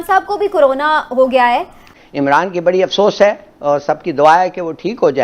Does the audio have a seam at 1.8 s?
yes; 1 cut; at 1.8 s

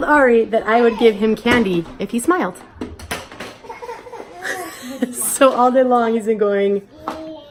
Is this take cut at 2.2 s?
no; 0 cuts

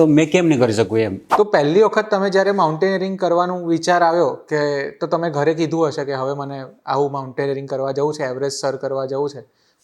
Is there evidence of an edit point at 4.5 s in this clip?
no; 1 cut; at 1.2 s

